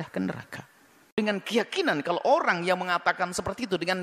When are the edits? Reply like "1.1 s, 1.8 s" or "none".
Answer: 1.2 s